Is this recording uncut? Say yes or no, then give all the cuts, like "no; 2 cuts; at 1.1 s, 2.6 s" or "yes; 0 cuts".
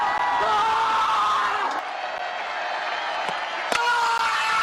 no; 1 cut; at 1.8 s